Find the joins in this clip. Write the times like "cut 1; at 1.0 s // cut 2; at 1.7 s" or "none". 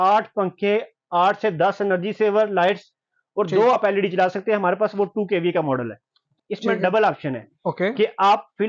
cut 1; at 6.4 s

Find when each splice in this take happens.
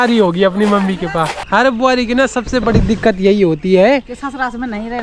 cut 1; at 1.4 s

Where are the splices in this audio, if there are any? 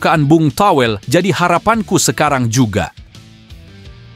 cut 1; at 3.0 s

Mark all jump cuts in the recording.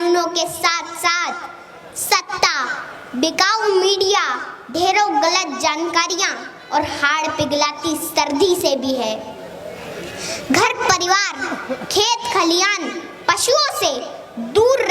none

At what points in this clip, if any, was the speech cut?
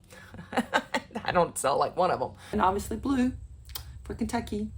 cut 1; at 2.5 s

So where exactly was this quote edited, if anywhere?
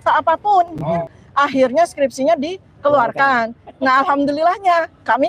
cut 1; at 1.0 s

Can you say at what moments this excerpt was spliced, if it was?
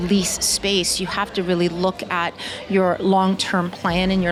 none

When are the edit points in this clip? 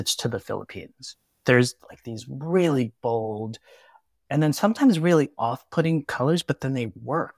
cut 1; at 1.3 s

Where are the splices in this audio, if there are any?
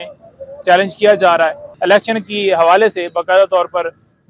cut 1; at 1.7 s

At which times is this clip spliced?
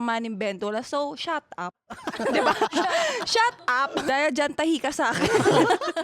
cut 1; at 4.0 s

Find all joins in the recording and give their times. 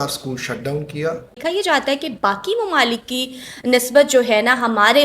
cut 1; at 1.4 s

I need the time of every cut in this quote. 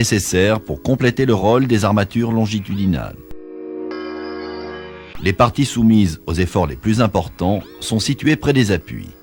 none

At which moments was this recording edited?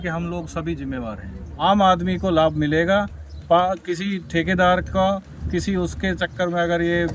cut 1; at 1.6 s

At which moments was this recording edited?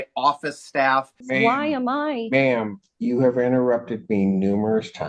cut 1; at 1.2 s

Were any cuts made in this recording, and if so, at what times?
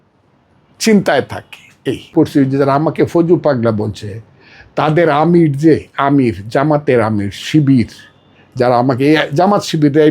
cut 1; at 2.1 s

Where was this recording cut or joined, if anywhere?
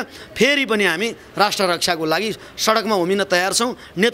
none

